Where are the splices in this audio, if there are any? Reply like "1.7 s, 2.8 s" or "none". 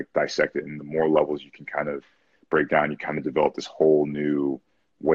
none